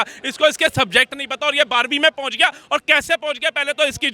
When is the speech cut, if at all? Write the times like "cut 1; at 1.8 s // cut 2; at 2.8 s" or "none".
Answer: none